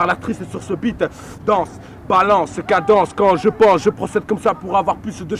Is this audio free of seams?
yes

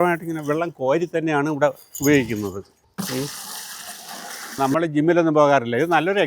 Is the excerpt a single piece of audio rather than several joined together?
no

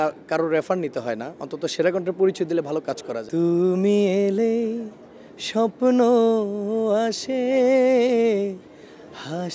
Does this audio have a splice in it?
yes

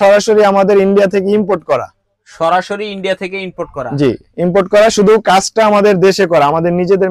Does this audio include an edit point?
no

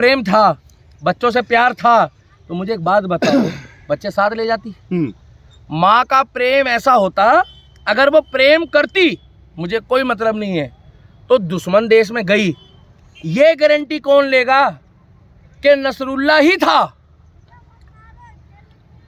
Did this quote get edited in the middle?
no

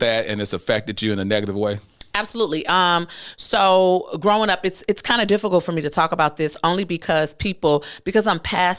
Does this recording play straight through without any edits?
yes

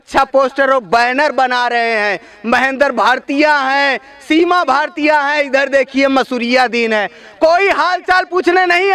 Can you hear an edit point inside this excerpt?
no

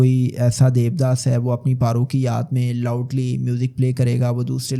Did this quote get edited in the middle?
no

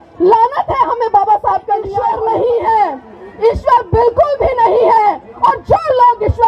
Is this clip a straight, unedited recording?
no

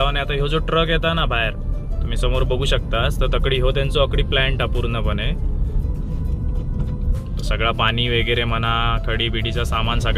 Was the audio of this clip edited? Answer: no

